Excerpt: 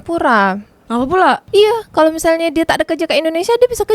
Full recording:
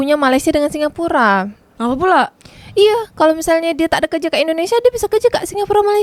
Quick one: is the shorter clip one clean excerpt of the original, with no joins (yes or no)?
no